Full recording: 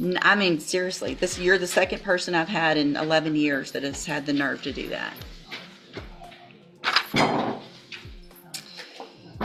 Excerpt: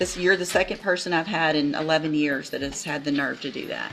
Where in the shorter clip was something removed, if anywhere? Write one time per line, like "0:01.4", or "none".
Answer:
none